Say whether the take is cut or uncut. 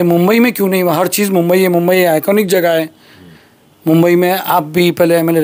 uncut